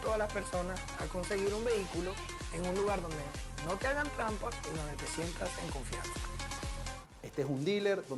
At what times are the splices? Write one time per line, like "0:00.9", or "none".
0:07.1